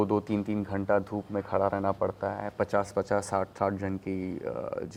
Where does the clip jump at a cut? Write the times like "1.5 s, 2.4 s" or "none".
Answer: none